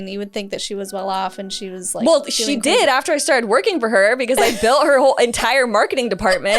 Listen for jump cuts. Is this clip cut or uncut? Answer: uncut